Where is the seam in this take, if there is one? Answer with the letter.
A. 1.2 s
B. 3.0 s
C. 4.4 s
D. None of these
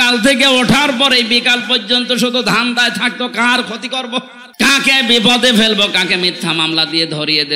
C